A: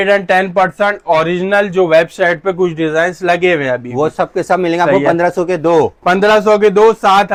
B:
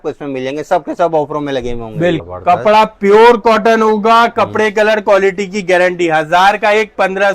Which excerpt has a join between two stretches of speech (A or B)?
B